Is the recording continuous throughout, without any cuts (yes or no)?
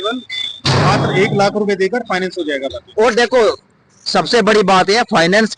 yes